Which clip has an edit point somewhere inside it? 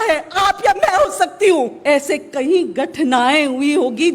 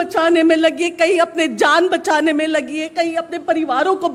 first; 1 cut; at 1.8 s

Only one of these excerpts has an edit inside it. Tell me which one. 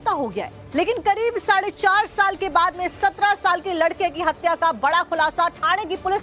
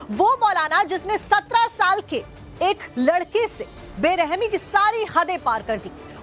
second; 1 cut; at 1.0 s

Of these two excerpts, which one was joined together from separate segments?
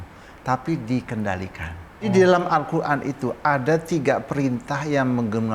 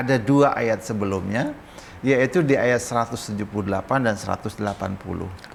first; 1 cut; at 2.1 s

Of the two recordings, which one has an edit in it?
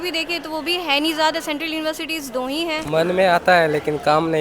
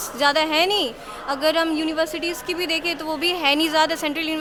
first; 1 cut; at 2.8 s

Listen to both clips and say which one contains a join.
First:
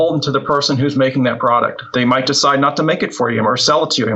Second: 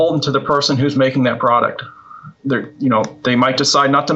first; 1 cut; at 1.8 s

